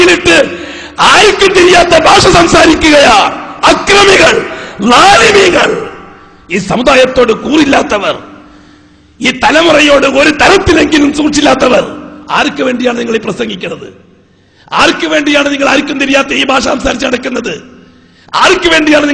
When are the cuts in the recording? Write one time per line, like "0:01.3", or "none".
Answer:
0:12.4